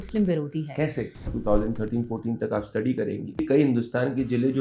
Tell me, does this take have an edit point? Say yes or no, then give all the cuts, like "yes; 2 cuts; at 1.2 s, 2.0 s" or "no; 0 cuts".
yes; 2 cuts; at 1.3 s, 3.4 s